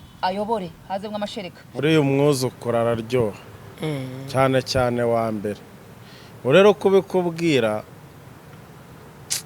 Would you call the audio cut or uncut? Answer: cut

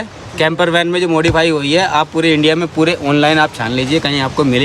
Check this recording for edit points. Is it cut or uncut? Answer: uncut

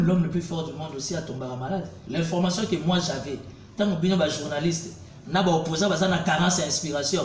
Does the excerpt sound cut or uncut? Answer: cut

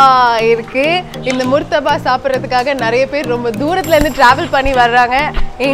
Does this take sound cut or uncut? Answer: uncut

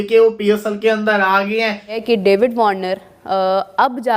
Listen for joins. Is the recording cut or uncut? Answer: cut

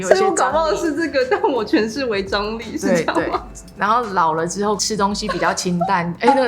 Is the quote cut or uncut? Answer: cut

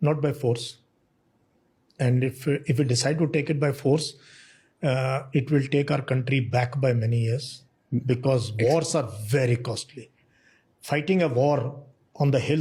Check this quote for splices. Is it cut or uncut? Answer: uncut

